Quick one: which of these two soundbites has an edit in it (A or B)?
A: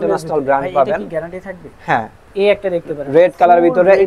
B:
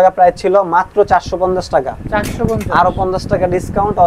A